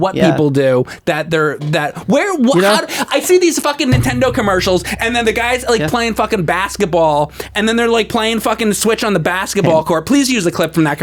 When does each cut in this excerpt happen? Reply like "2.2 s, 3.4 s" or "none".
none

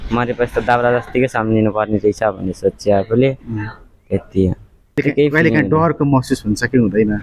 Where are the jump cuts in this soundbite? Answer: 5.0 s

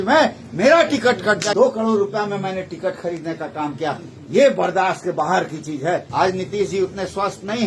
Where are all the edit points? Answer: 1.5 s, 6.1 s

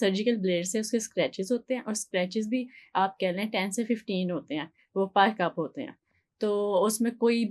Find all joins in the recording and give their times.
none

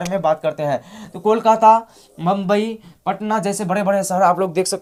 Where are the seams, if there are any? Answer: none

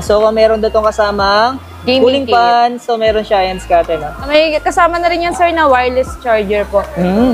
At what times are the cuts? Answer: 4.3 s

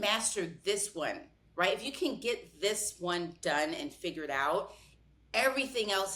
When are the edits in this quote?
none

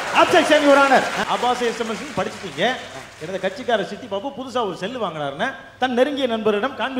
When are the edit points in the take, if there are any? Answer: 1.2 s

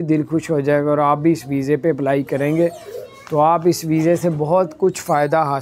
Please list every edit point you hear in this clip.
none

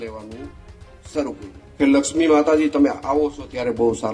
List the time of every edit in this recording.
1.6 s

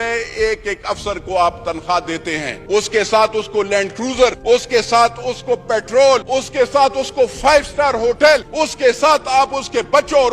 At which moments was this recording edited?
2.5 s, 4.4 s, 6.3 s, 8.5 s

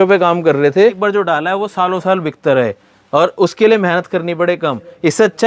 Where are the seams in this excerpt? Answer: 1.0 s

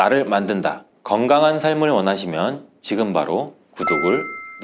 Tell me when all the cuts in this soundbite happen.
none

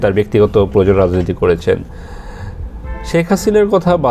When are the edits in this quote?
none

